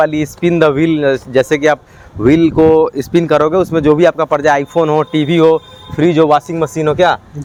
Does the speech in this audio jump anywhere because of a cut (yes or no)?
no